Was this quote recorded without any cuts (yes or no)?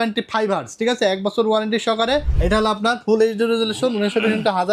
no